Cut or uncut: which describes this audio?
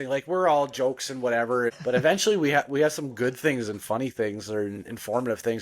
cut